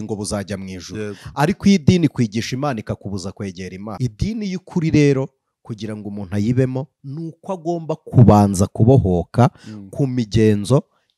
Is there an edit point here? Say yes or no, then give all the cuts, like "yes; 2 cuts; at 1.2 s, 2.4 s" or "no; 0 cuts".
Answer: yes; 1 cut; at 4.0 s